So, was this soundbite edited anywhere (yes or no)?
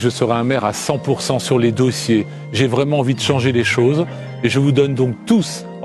no